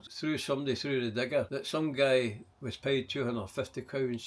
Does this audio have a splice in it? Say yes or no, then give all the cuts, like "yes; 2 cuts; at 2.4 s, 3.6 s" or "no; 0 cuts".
yes; 1 cut; at 1.6 s